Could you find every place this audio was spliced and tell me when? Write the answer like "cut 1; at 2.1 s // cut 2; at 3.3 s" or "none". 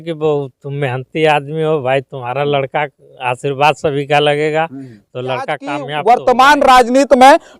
cut 1; at 5.9 s